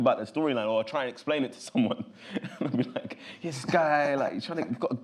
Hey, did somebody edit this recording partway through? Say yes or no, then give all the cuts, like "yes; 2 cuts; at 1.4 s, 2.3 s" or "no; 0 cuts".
no; 0 cuts